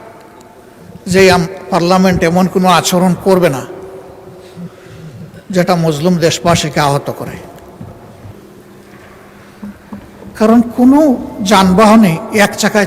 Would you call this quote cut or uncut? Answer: cut